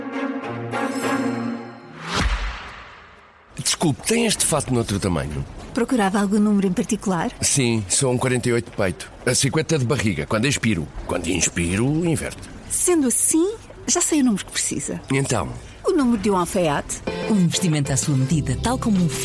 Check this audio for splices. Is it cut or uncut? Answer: cut